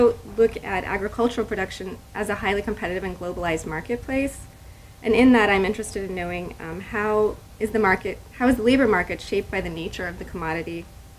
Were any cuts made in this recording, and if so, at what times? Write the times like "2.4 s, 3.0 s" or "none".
2.4 s